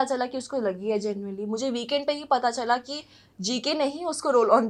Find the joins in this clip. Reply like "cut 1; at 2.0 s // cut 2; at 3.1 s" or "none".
none